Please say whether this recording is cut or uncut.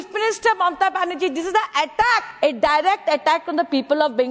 cut